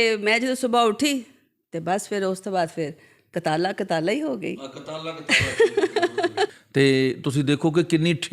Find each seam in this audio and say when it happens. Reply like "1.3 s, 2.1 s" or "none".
6.6 s